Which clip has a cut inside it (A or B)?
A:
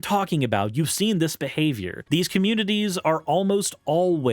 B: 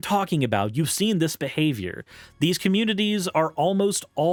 A